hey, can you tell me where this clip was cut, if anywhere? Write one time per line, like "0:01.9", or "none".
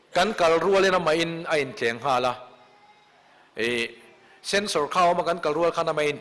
0:03.0